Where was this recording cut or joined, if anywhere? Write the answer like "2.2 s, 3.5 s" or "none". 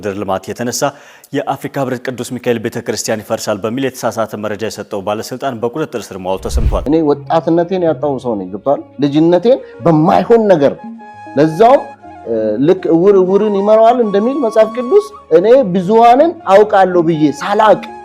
6.8 s